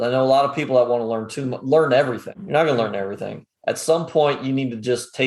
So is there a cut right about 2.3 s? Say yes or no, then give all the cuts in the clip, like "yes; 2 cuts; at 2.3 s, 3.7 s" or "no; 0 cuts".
yes; 1 cut; at 2.3 s